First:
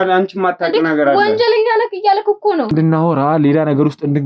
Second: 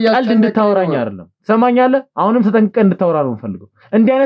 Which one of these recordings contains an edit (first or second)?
first